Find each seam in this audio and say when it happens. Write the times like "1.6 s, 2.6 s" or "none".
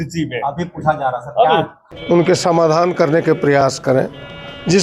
1.8 s

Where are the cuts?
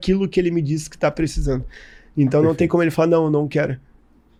none

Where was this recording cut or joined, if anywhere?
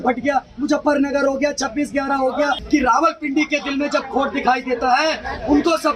2.6 s

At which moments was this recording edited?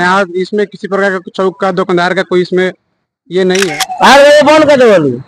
3.8 s

